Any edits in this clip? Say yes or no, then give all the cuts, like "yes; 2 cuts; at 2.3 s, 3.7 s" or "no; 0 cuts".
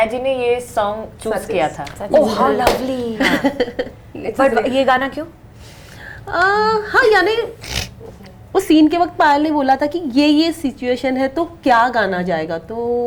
no; 0 cuts